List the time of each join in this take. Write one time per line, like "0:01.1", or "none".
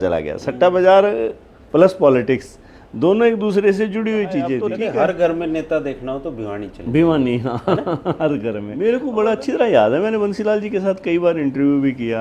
0:04.7
0:08.7